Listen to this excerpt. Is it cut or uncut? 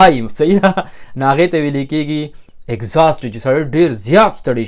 uncut